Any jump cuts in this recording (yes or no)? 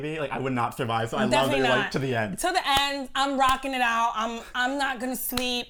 no